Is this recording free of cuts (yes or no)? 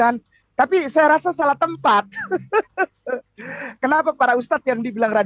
yes